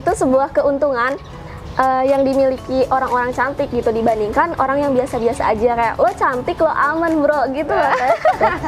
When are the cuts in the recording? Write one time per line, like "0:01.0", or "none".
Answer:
none